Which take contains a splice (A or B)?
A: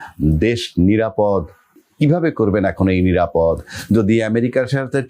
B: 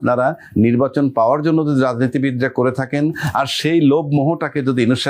A